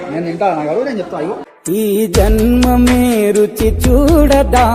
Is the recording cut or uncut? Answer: uncut